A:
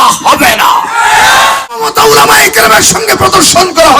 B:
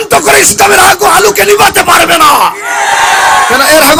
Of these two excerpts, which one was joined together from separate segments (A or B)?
A